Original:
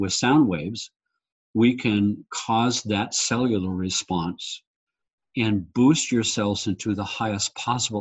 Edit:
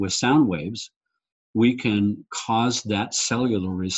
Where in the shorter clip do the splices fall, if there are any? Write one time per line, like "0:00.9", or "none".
none